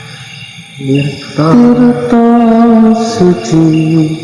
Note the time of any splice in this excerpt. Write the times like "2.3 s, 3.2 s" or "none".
none